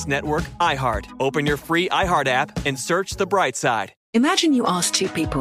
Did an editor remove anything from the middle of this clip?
yes; 1 cut; at 3.9 s

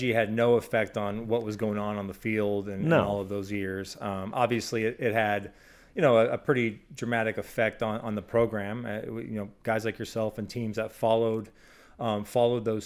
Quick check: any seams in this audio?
no; 0 cuts

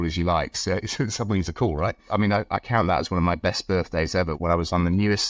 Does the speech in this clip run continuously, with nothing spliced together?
no; 1 cut; at 2.0 s

